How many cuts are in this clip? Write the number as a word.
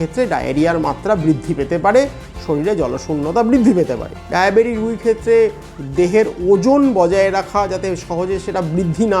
one